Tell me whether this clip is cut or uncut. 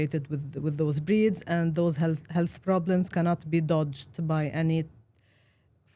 uncut